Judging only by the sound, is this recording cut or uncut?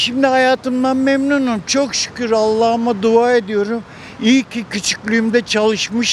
uncut